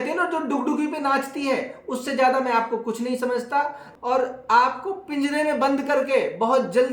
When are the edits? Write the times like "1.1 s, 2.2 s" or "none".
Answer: 3.8 s